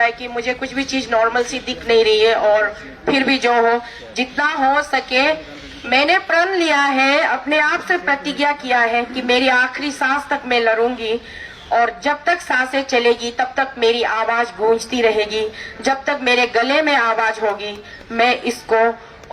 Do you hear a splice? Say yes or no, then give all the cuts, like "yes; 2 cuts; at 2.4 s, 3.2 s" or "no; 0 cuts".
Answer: no; 0 cuts